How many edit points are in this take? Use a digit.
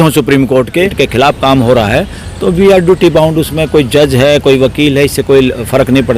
1